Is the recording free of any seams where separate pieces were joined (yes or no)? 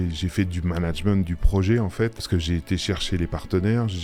no